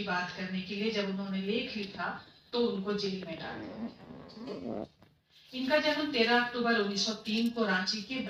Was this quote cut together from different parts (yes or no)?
no